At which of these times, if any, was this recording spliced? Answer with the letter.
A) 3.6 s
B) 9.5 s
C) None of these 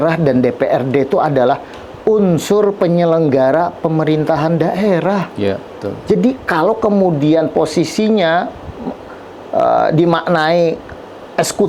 C